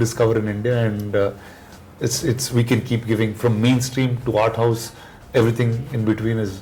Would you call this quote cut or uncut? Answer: uncut